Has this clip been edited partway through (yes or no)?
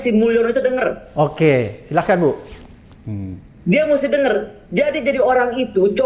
no